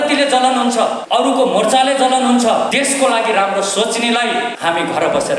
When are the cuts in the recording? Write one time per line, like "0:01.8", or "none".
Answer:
0:01.0
0:02.7
0:04.5